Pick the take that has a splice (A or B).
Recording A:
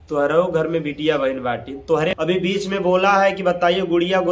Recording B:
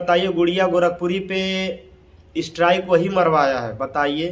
A